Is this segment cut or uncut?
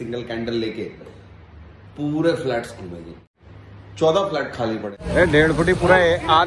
cut